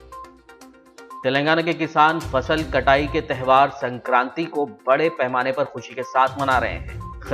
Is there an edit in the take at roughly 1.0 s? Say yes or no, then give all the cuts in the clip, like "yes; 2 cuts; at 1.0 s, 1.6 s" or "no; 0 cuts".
no; 0 cuts